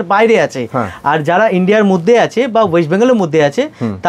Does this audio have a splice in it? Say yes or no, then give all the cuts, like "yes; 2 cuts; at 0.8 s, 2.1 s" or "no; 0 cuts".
no; 0 cuts